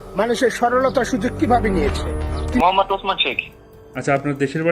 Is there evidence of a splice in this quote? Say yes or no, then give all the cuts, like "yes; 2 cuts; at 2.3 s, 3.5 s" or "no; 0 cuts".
yes; 1 cut; at 2.6 s